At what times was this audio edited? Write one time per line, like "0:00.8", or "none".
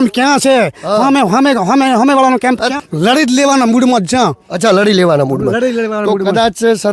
0:02.8